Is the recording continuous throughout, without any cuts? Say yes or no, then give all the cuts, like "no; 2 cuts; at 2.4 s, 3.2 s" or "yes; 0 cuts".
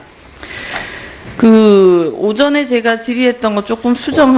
no; 1 cut; at 2.2 s